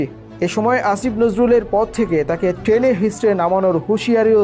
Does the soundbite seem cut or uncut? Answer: uncut